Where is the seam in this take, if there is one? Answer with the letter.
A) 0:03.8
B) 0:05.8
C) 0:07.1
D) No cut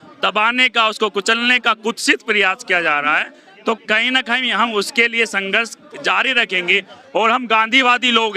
A